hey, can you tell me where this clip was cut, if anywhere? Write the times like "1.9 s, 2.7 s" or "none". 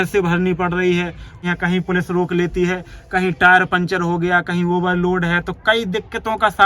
1.4 s